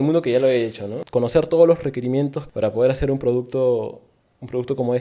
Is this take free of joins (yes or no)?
no